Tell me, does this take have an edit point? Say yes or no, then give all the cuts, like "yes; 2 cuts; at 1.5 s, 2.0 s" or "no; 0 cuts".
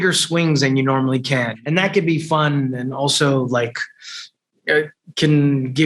yes; 1 cut; at 1.5 s